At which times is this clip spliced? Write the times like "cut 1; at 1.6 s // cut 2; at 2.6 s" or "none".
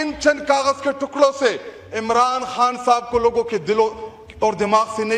none